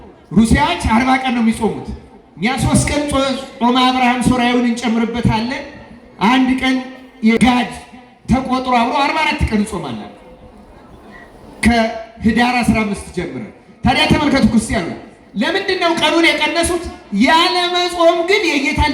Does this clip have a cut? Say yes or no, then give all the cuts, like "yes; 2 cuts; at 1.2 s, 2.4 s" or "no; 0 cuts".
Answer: yes; 1 cut; at 7.4 s